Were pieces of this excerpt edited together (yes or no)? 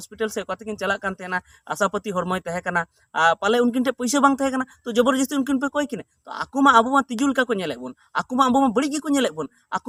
no